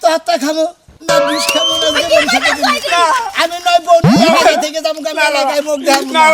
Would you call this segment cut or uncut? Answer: uncut